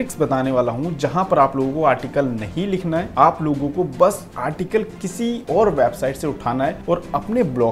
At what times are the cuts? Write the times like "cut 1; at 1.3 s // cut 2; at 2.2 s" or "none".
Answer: cut 1; at 3.1 s // cut 2; at 4.3 s // cut 3; at 5.4 s // cut 4; at 6.8 s